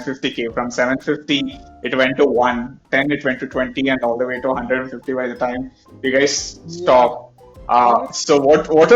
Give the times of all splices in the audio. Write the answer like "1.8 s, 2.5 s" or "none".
2.9 s